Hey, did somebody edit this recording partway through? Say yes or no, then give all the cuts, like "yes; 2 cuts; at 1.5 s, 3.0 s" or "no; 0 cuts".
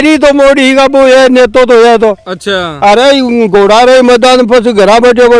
no; 0 cuts